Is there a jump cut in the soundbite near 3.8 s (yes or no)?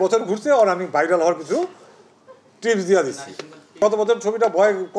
yes